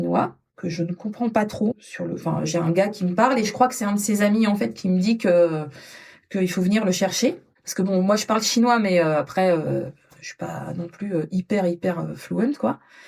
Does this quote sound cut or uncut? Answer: cut